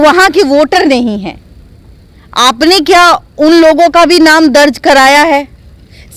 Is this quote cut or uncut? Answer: uncut